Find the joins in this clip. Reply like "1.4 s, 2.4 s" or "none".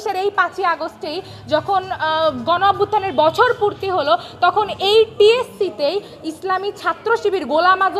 none